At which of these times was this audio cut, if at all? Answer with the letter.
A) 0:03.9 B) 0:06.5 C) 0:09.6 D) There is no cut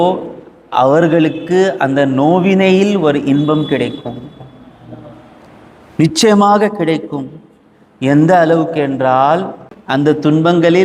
D